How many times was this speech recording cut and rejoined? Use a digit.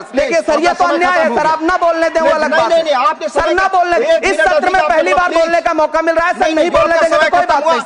0